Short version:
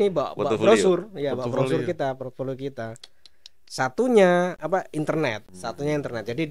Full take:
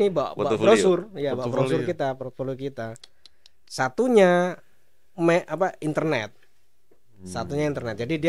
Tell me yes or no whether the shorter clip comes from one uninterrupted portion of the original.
no